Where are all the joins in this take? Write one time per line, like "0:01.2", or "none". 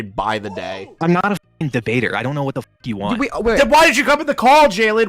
0:00.9